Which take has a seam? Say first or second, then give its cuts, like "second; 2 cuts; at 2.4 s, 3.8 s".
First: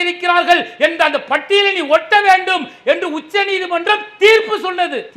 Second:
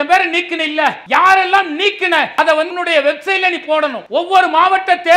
second; 3 cuts; at 1.0 s, 2.5 s, 4.0 s